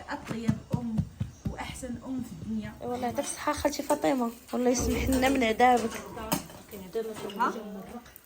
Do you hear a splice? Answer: yes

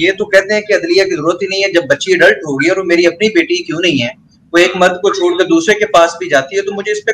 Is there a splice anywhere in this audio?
no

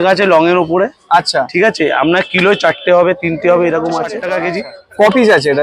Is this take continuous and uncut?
no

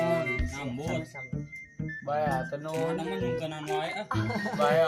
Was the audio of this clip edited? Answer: no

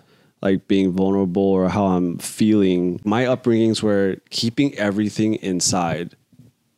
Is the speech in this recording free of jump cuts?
no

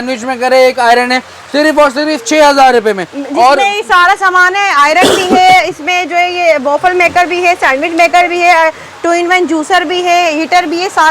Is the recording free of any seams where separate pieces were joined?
yes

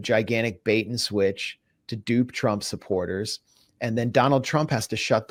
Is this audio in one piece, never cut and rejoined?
yes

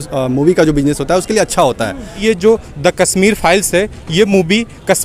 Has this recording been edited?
yes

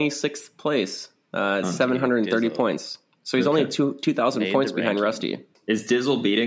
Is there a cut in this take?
yes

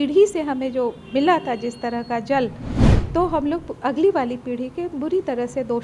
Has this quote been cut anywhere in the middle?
yes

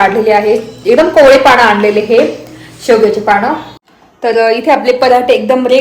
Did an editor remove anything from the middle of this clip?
yes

